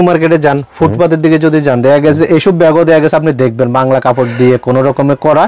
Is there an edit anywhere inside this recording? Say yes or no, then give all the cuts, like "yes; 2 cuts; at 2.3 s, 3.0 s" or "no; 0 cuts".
no; 0 cuts